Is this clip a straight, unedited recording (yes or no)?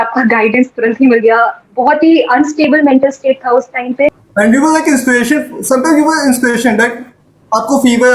no